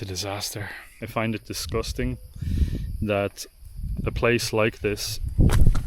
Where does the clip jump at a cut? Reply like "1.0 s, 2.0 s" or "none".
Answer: 1.0 s